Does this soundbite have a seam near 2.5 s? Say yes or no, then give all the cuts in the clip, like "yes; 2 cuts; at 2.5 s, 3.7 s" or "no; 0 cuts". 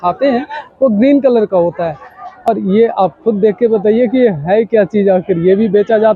yes; 1 cut; at 2.5 s